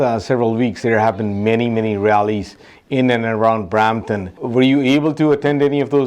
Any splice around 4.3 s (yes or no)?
yes